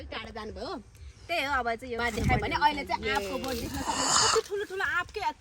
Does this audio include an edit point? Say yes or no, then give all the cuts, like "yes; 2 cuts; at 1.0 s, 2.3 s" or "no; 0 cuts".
yes; 1 cut; at 2.0 s